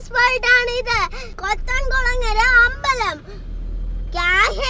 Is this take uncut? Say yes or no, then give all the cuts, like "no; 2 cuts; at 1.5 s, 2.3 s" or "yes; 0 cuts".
no; 1 cut; at 0.9 s